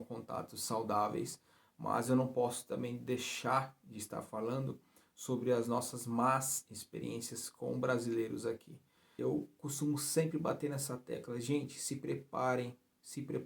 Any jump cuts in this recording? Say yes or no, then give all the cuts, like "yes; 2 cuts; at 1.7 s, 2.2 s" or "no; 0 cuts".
yes; 1 cut; at 9.1 s